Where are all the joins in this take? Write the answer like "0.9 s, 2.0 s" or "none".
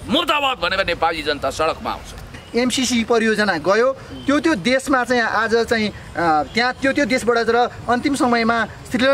2.3 s